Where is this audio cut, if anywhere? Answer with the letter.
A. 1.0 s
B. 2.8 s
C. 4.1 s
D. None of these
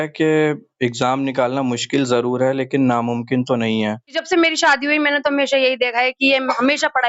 C